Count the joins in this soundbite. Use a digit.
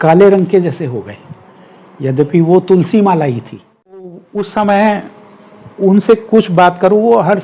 1